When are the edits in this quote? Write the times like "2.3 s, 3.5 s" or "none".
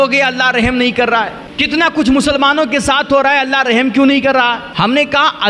1.4 s, 4.7 s